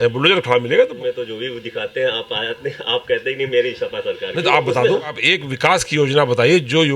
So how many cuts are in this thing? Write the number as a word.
two